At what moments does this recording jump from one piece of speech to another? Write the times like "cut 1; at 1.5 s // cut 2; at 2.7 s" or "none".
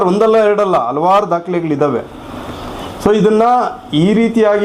none

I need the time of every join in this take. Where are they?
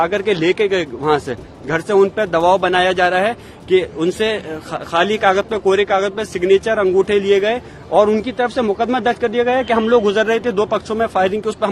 none

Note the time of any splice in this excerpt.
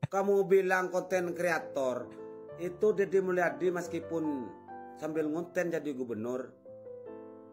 none

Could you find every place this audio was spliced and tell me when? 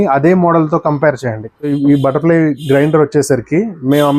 cut 1; at 1.5 s

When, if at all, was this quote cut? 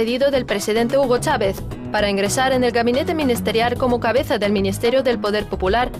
cut 1; at 2.0 s

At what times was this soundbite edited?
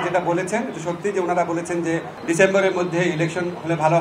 cut 1; at 2.1 s

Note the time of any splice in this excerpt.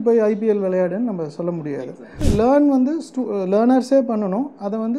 cut 1; at 2.2 s

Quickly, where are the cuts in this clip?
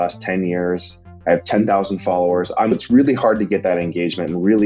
cut 1; at 2.7 s

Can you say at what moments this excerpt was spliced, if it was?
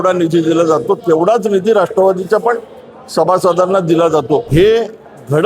cut 1; at 4.5 s

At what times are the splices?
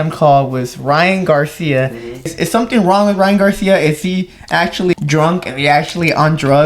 cut 1; at 2.3 s // cut 2; at 4.9 s

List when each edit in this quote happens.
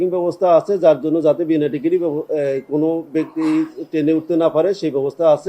none

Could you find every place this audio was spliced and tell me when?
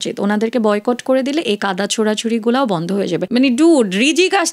cut 1; at 3.2 s

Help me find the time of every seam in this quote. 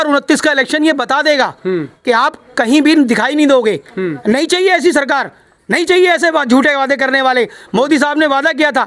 none

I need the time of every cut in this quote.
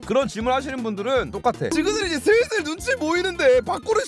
cut 1; at 1.7 s

